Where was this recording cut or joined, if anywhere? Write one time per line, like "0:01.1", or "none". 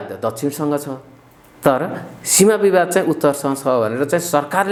none